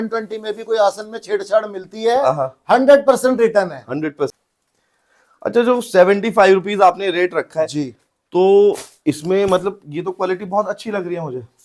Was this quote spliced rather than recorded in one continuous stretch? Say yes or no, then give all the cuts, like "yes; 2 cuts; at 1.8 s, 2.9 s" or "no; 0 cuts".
yes; 1 cut; at 4.4 s